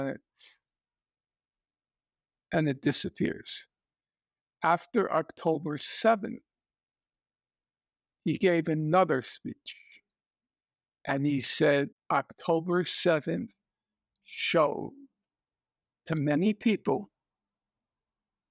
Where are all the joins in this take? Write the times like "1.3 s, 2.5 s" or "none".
12.0 s

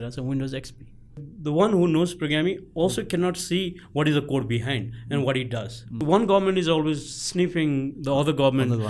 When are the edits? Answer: 1.3 s, 6.0 s

